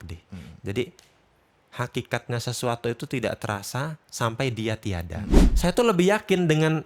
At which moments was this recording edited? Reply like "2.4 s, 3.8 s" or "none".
5.4 s